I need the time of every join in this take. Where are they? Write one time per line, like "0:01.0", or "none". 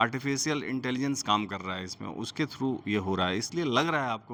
none